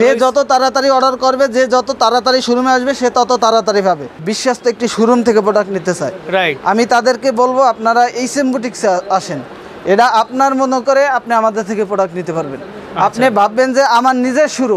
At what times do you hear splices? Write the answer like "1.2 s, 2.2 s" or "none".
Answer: 4.3 s